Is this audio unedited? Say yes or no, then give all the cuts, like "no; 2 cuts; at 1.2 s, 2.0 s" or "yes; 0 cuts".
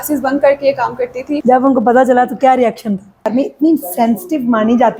no; 2 cuts; at 1.4 s, 3.3 s